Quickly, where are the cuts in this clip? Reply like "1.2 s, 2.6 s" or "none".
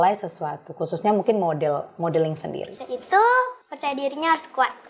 2.7 s, 3.7 s